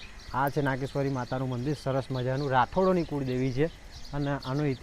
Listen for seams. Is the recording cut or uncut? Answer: uncut